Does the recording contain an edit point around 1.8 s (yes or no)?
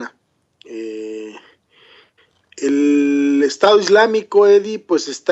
no